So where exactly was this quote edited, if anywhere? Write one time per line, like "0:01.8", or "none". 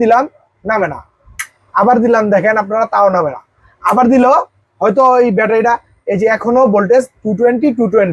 none